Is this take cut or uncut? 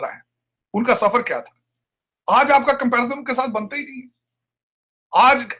uncut